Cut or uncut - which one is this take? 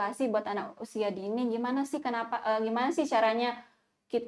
uncut